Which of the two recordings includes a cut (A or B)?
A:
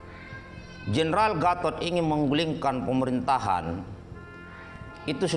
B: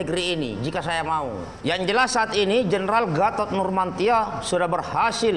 B